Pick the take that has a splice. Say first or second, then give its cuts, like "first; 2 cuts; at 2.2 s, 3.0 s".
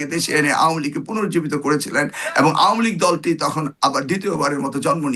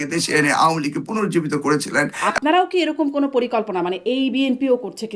second; 1 cut; at 2.2 s